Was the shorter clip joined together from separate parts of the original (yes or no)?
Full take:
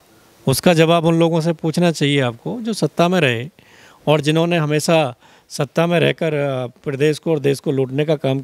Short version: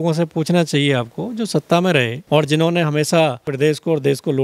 yes